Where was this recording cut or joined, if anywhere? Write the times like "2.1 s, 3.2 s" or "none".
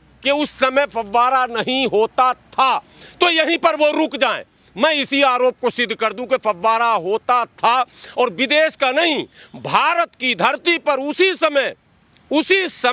none

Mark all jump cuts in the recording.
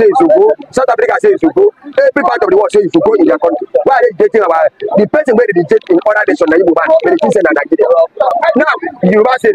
8.3 s

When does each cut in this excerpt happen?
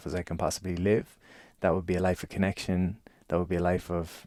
none

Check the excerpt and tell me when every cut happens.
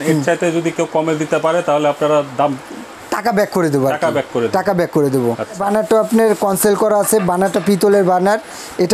5.6 s

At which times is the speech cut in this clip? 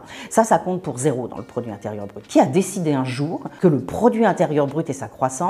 2.1 s, 3.4 s

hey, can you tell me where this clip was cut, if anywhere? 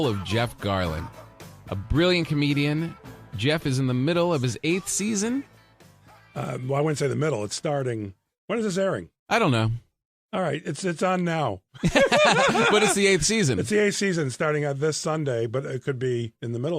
4.7 s

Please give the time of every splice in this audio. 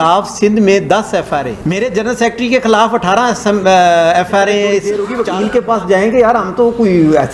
1.6 s, 5.0 s

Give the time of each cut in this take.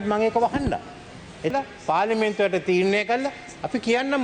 1.5 s

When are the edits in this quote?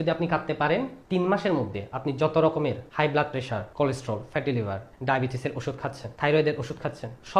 none

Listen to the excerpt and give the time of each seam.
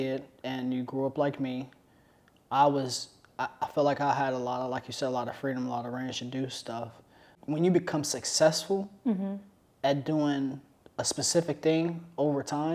7.3 s

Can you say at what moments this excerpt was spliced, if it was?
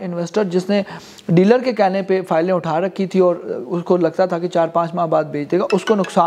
none

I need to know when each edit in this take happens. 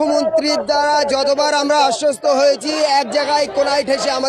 none

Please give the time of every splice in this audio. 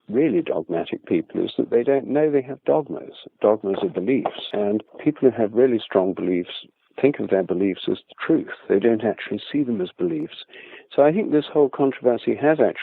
4.5 s

